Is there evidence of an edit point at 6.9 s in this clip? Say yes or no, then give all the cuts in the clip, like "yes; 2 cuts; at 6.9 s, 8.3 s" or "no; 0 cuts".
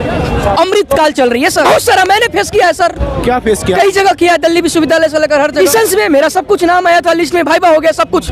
no; 2 cuts; at 1.7 s, 5.6 s